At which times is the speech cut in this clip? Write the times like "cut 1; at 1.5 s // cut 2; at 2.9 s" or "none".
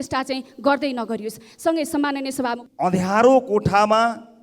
cut 1; at 2.6 s